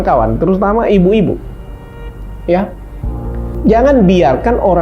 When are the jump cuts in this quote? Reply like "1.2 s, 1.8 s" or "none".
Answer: 3.5 s